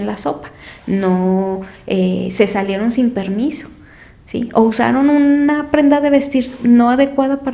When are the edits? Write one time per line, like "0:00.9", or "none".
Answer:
none